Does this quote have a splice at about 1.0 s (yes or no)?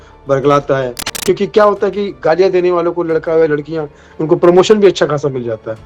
yes